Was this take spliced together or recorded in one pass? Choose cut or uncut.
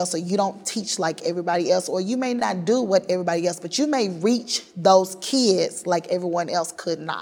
cut